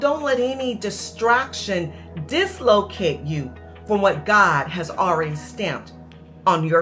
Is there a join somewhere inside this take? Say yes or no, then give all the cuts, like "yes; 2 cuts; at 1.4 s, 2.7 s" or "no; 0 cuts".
no; 0 cuts